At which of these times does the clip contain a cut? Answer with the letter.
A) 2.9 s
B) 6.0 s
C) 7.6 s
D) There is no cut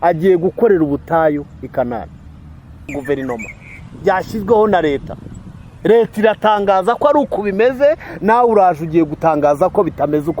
A